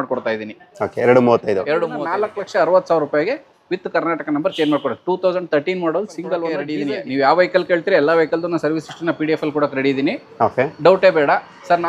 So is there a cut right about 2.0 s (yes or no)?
yes